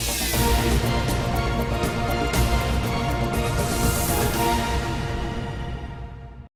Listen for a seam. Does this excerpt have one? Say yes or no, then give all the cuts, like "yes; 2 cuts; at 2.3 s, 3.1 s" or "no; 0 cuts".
no; 0 cuts